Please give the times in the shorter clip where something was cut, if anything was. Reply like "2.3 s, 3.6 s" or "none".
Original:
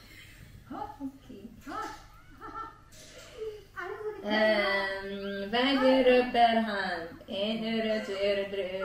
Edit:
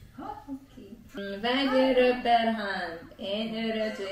1.1 s